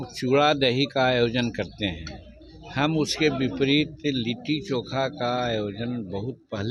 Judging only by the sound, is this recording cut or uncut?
uncut